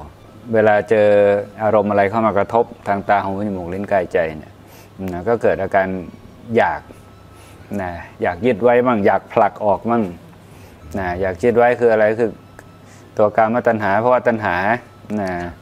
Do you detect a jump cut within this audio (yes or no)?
no